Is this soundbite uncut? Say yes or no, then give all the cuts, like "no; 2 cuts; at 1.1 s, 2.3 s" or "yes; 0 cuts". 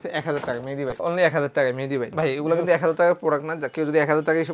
no; 2 cuts; at 1.0 s, 2.1 s